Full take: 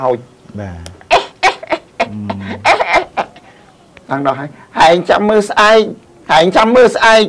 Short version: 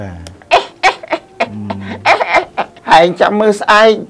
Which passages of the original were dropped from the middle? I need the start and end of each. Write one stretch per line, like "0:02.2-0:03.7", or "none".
0:03.4-0:04.6

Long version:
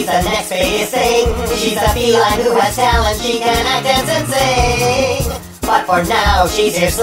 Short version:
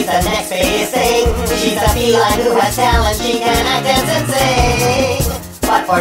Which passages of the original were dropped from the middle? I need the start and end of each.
none

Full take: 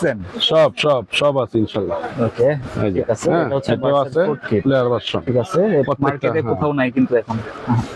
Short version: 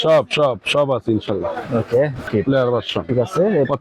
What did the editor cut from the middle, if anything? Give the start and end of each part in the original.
0:02.7-0:04.4

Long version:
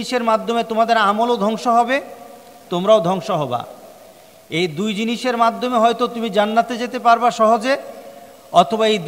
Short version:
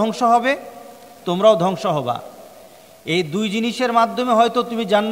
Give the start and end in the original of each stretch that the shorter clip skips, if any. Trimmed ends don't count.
none

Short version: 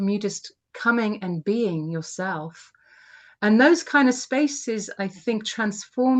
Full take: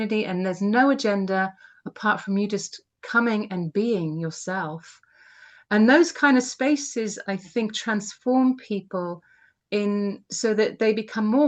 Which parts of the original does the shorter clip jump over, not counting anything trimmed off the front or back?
none

